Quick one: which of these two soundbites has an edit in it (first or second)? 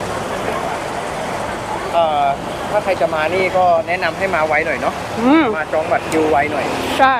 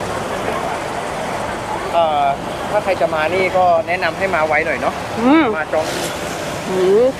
second